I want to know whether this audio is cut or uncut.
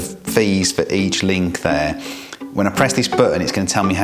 uncut